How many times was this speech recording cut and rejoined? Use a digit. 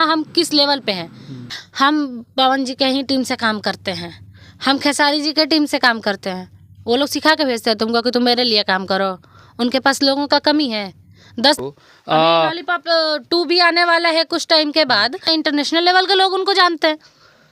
3